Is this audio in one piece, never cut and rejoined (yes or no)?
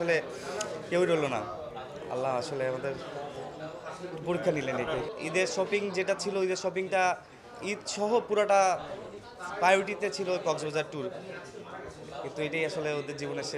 no